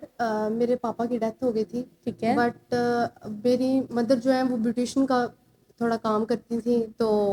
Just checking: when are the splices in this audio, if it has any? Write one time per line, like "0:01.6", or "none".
none